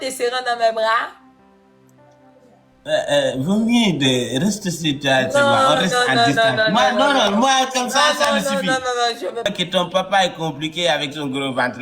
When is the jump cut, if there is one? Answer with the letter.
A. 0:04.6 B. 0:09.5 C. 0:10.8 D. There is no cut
B